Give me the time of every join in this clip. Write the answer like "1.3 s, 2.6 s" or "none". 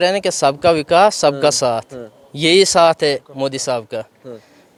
none